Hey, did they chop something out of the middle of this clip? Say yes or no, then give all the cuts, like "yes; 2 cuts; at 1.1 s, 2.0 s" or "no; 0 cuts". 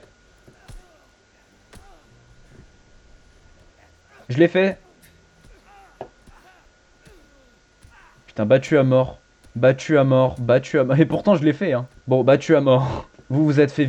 no; 0 cuts